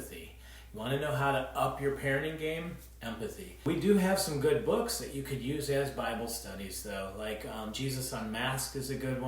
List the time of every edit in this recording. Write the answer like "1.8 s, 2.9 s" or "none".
3.6 s